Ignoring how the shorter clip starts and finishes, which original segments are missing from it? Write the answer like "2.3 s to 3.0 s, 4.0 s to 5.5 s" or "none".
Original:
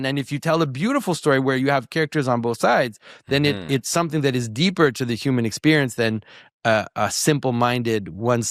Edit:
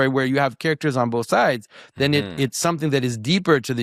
none